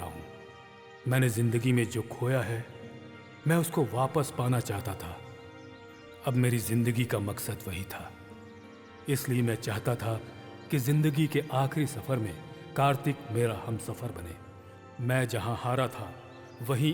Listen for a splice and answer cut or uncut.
uncut